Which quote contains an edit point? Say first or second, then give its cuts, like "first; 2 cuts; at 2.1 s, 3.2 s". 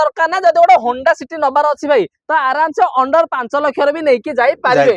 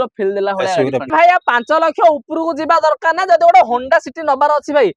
second; 1 cut; at 1.1 s